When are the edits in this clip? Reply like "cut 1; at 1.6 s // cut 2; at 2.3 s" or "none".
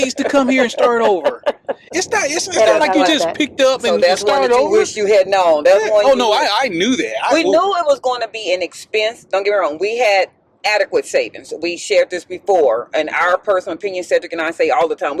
none